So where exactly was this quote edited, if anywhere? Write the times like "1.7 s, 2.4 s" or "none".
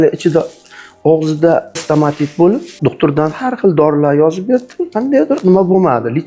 1.8 s, 2.7 s